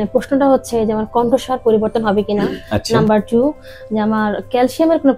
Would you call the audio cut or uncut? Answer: uncut